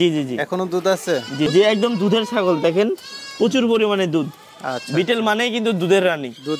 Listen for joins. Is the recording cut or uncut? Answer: cut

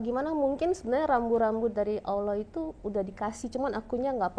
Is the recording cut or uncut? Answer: uncut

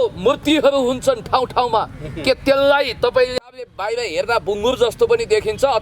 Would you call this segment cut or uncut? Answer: cut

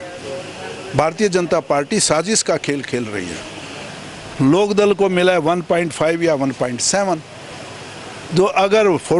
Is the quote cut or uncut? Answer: cut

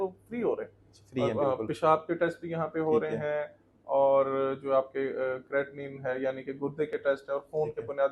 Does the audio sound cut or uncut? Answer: uncut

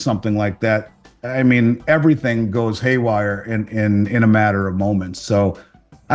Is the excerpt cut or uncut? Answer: uncut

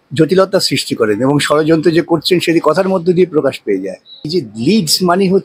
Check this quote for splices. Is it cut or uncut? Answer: cut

